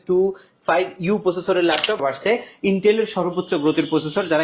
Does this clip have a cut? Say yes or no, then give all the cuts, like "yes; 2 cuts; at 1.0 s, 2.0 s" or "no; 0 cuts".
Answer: yes; 1 cut; at 2.0 s